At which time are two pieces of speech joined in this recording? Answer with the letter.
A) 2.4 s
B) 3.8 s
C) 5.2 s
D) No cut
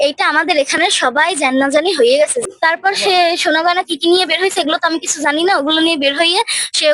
A